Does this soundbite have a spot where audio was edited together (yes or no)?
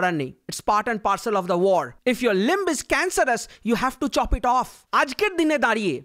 yes